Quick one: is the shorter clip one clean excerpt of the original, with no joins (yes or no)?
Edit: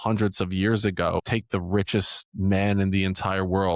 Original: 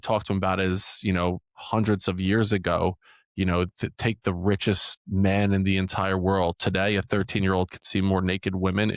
no